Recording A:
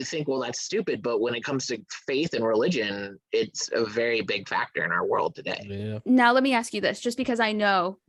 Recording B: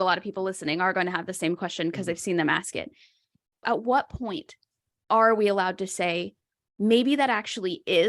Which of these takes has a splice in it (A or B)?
B